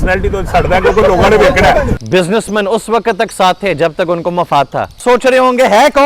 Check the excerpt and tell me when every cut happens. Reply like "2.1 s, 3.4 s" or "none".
1.9 s, 5.0 s